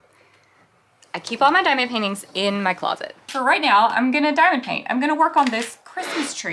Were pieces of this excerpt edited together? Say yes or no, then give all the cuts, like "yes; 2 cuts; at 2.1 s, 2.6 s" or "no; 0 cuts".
yes; 1 cut; at 3.3 s